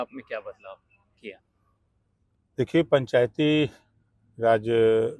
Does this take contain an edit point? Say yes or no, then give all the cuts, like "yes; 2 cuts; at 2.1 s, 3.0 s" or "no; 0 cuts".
no; 0 cuts